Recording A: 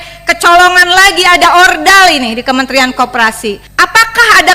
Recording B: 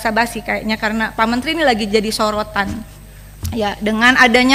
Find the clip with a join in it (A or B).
A